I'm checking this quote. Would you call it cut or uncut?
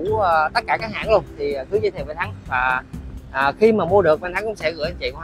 uncut